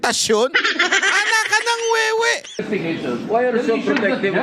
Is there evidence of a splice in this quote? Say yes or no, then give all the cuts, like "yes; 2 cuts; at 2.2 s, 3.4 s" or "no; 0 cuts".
yes; 1 cut; at 2.6 s